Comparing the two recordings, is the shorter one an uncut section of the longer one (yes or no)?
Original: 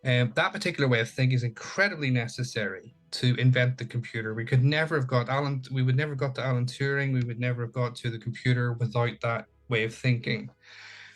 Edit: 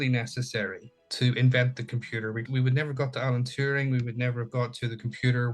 no